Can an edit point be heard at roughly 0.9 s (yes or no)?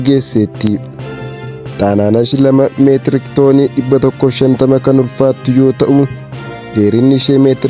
no